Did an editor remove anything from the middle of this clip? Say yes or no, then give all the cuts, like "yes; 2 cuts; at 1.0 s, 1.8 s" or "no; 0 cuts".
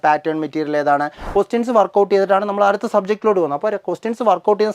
yes; 1 cut; at 1.2 s